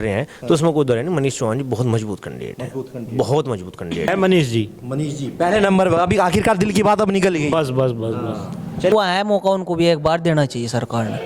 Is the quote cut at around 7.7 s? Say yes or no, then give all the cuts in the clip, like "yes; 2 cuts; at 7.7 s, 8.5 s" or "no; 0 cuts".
no; 2 cuts; at 4.1 s, 8.9 s